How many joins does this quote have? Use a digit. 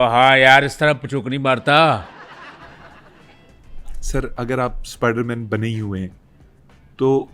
2